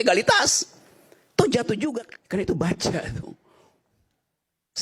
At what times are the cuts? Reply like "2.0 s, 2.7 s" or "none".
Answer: 2.1 s